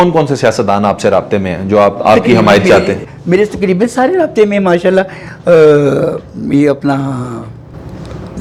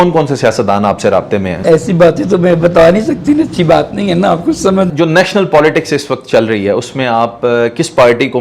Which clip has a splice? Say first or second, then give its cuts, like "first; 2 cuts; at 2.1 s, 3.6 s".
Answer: second; 2 cuts; at 1.6 s, 4.9 s